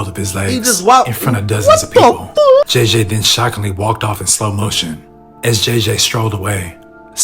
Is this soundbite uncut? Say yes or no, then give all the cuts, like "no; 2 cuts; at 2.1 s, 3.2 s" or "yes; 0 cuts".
no; 1 cut; at 2.7 s